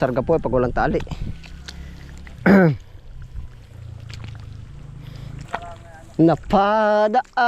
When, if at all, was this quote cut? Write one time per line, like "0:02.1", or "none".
0:05.4